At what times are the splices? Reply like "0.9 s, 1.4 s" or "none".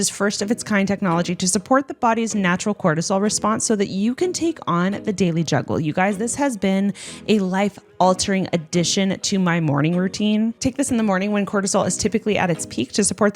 10.6 s